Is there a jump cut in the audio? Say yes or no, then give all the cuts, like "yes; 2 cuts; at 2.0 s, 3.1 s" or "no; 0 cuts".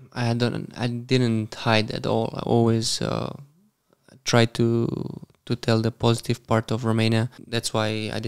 yes; 1 cut; at 7.4 s